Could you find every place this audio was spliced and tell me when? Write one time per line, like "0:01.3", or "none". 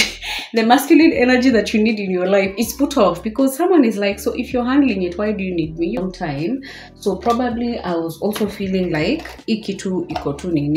0:06.0

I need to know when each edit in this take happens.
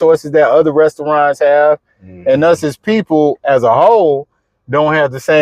none

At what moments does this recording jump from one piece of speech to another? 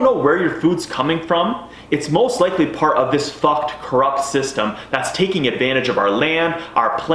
none

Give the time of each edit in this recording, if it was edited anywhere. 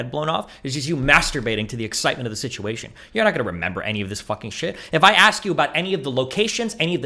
none

